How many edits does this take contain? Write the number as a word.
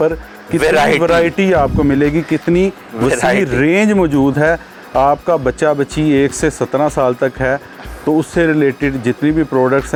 zero